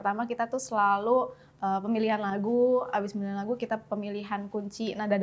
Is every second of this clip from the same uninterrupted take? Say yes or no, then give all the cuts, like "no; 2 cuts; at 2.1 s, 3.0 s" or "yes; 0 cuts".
yes; 0 cuts